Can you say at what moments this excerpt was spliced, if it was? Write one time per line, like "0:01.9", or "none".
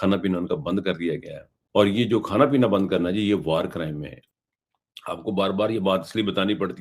0:02.0
0:04.2

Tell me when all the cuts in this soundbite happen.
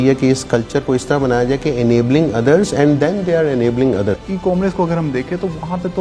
0:04.2

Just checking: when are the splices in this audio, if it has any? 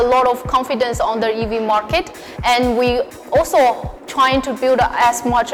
none

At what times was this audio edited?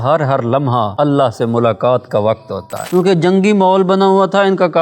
0:00.9
0:02.8

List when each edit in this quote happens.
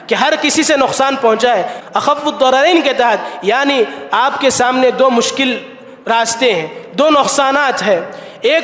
0:01.8

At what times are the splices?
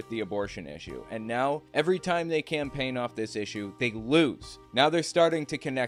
none

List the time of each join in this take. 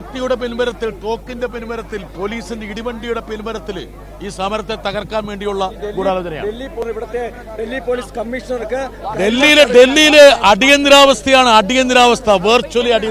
0:06.8

